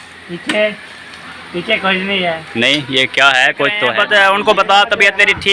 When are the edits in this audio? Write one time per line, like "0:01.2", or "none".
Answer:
0:03.9